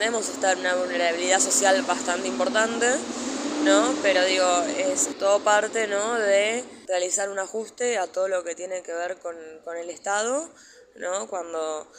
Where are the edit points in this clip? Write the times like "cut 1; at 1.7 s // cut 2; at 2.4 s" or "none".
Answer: cut 1; at 5.1 s // cut 2; at 6.7 s